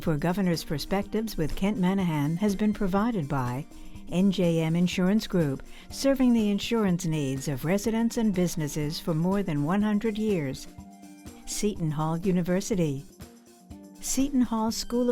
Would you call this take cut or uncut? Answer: uncut